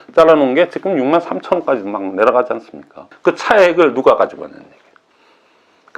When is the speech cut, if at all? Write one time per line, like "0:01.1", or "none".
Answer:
0:03.1